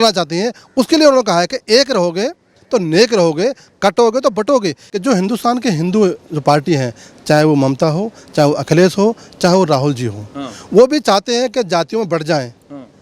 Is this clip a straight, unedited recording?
no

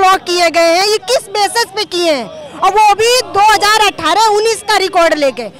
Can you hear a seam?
no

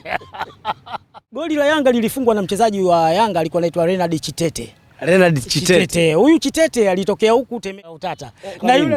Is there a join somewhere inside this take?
yes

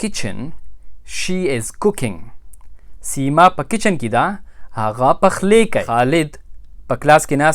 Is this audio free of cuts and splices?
no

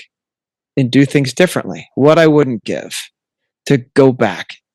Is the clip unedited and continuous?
yes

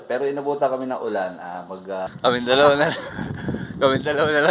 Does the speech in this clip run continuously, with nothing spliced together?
no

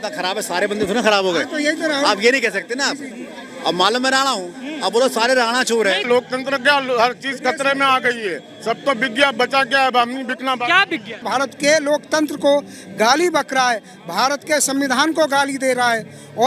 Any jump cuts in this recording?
yes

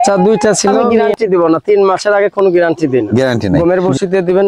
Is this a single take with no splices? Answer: no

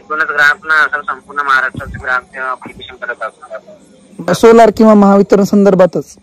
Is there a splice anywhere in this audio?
yes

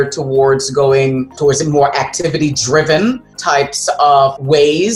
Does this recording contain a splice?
no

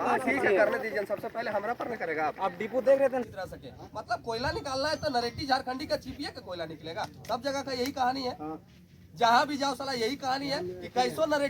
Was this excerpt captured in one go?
no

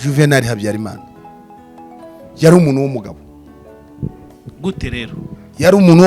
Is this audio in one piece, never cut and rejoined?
yes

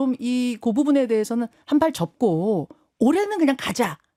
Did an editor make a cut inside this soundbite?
no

